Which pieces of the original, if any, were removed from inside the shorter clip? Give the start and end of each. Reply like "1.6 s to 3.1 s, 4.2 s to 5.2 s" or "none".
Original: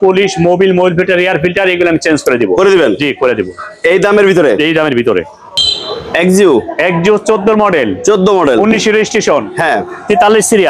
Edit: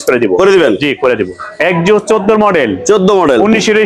3.7 s to 6.7 s